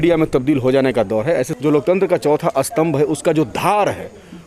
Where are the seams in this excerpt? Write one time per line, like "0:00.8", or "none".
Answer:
0:01.5